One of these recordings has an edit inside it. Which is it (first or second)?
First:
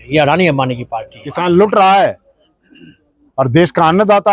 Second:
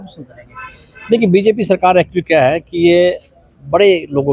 first